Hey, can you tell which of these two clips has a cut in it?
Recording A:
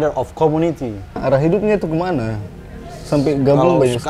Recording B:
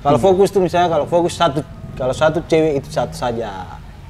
A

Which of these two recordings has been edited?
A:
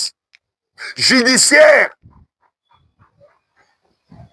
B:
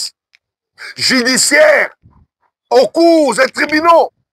B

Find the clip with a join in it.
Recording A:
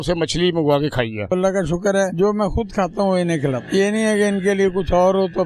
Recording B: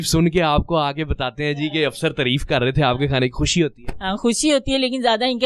A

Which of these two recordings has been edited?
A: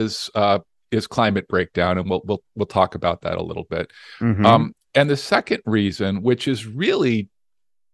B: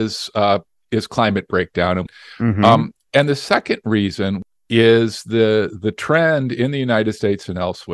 B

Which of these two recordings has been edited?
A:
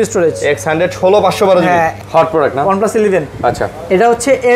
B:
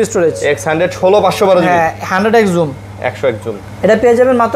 A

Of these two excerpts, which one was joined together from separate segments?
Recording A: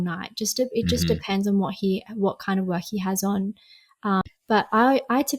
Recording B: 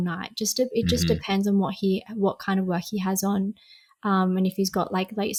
A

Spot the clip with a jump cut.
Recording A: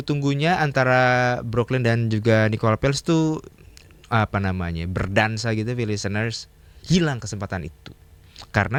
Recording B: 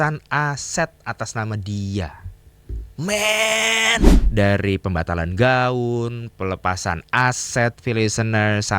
B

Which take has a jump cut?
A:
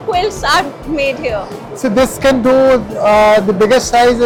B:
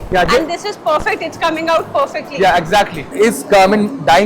B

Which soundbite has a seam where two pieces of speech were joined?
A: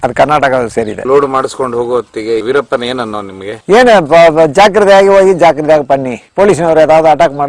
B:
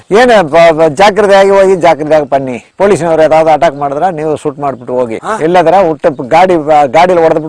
A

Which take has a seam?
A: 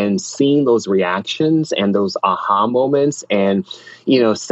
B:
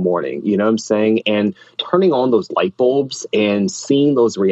B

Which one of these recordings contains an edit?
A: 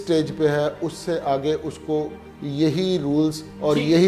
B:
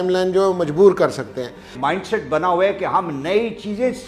B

